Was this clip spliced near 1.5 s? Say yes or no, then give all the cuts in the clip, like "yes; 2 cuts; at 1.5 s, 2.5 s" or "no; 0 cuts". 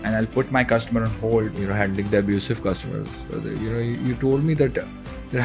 yes; 1 cut; at 1.5 s